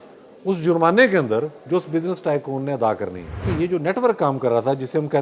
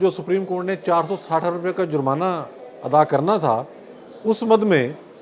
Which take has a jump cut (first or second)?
first